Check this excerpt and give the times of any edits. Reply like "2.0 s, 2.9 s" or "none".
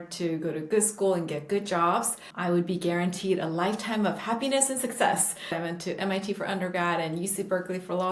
2.2 s, 5.6 s

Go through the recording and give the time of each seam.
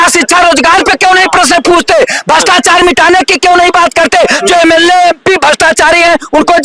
none

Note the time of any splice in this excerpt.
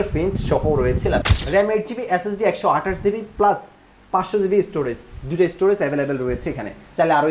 1.3 s

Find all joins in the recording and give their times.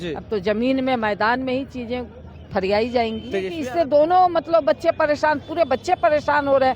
3.5 s

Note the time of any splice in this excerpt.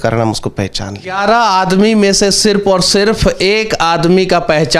1.1 s

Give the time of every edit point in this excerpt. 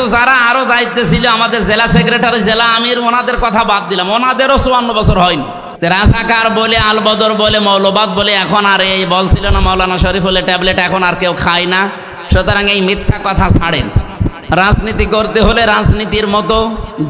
5.6 s

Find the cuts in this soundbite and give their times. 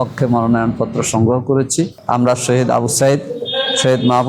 1.9 s

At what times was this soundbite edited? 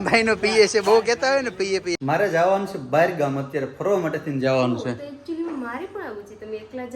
1.9 s

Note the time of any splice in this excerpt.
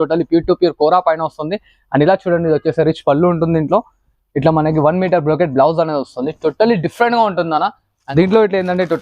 7.9 s

